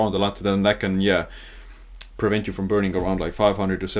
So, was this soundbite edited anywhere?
no; 0 cuts

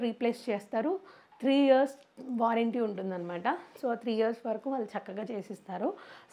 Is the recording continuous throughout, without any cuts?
yes; 0 cuts

